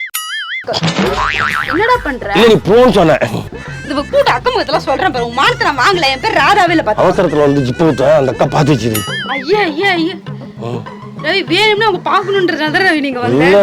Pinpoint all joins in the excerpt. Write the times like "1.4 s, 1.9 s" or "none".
3.4 s

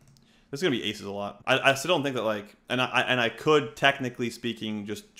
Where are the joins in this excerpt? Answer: 1.4 s

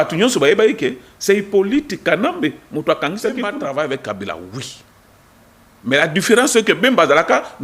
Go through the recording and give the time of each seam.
3.6 s

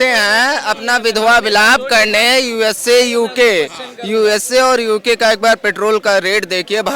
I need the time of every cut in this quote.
none

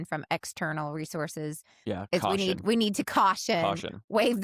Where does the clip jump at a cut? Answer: none

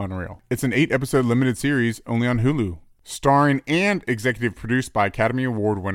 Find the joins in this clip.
2.8 s

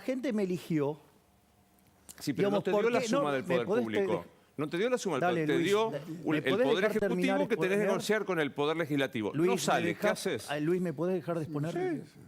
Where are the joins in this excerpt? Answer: none

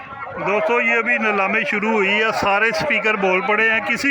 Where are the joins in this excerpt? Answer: none

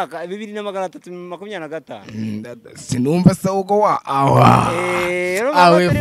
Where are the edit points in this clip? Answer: none

